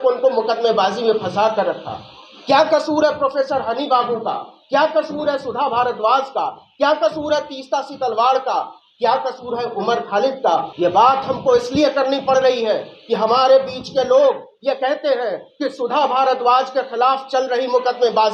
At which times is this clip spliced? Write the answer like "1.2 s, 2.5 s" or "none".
10.7 s

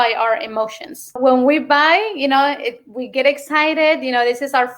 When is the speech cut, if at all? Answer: 1.2 s

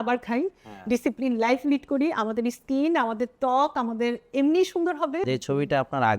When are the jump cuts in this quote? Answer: 5.2 s

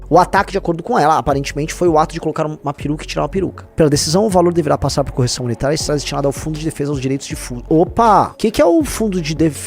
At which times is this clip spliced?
3.6 s, 8.3 s

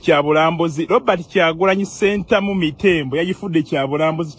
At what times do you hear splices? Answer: none

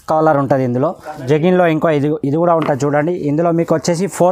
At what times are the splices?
1.1 s

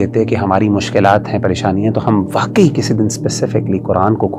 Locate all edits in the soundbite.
none

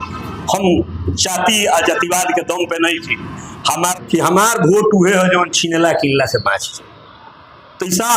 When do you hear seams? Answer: 3.9 s

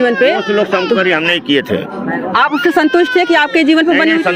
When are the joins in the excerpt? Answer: none

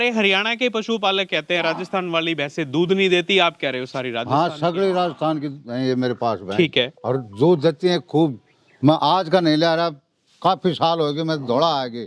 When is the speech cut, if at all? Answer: none

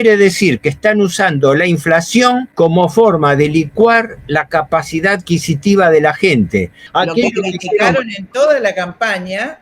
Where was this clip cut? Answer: 2.5 s, 6.8 s

